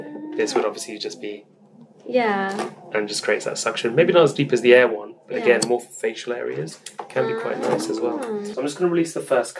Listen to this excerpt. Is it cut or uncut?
cut